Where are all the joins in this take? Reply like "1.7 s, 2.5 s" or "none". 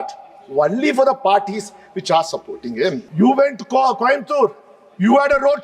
3.1 s